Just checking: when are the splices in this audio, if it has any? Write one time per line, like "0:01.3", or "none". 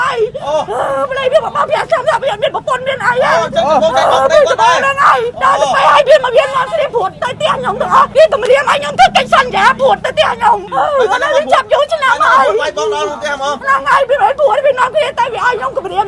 0:05.3
0:08.1
0:10.7